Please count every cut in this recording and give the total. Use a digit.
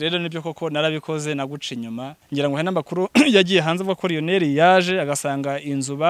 1